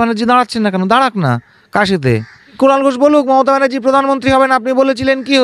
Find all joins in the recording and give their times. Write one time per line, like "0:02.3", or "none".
0:02.6